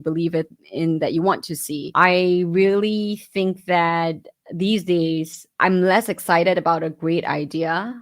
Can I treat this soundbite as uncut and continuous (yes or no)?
no